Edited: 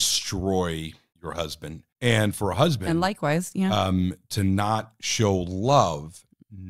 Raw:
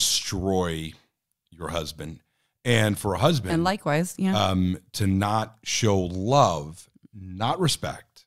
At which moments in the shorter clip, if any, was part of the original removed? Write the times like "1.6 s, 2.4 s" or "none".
1.4 s